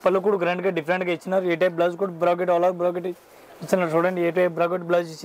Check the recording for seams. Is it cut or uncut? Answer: uncut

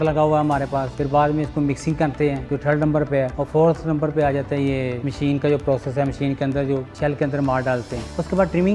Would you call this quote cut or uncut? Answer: cut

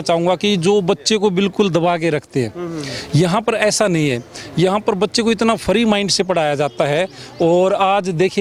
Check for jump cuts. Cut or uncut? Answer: uncut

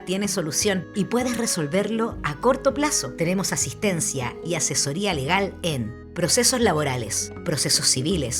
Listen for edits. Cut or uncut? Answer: cut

